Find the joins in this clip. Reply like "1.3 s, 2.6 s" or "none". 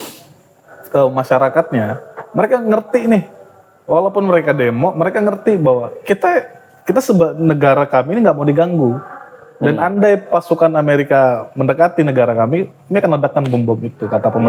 none